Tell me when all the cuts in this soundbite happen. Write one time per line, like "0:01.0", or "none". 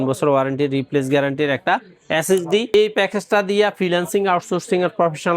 0:02.7